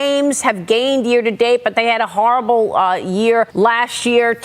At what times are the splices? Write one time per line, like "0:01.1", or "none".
0:03.5